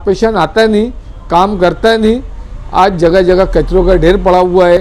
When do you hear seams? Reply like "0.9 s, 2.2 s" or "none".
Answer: none